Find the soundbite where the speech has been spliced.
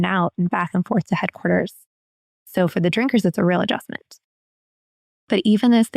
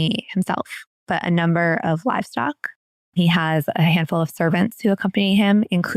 first; 1 cut; at 4.5 s

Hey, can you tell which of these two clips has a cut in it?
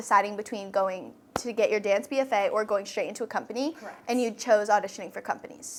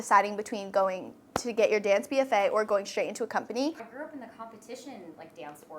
second; 1 cut; at 3.9 s

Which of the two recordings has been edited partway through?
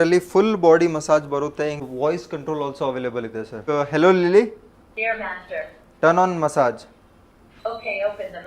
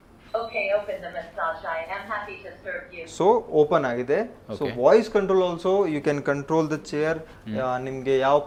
first; 2 cuts; at 1.8 s, 3.6 s

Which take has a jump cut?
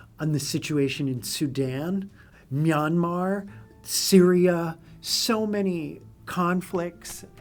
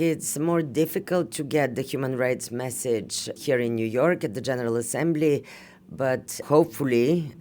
second; 2 cuts; at 3.4 s, 6.4 s

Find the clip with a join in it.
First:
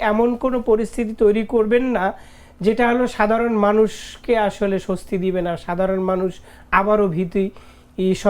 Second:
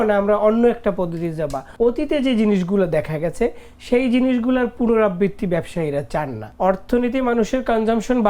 second; 2 cuts; at 1.6 s, 6.4 s

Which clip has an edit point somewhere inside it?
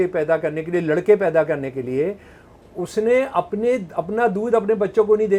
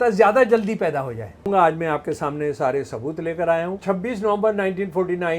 second; 2 cuts; at 1.5 s, 3.8 s

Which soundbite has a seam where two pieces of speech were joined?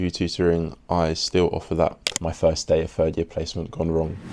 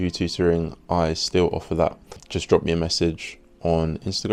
first; 1 cut; at 2.2 s

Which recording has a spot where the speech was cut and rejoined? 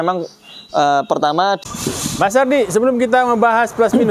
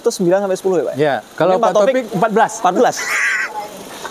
first; 1 cut; at 1.6 s

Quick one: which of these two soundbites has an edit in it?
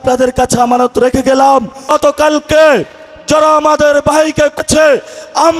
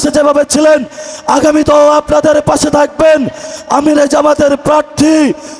first; 2 cuts; at 1.8 s, 4.6 s

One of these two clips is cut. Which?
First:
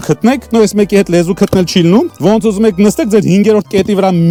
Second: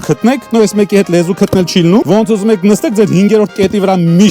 second; 1 cut; at 2.0 s

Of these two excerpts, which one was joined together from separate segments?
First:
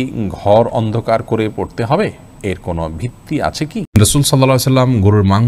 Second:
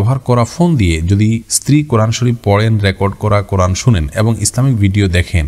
first; 1 cut; at 3.9 s

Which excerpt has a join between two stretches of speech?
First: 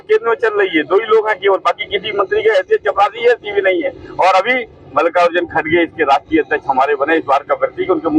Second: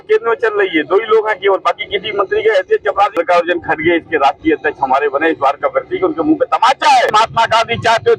second; 2 cuts; at 3.2 s, 7.1 s

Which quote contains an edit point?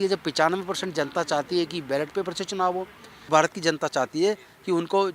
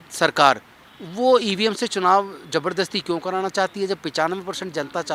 first; 1 cut; at 3.3 s

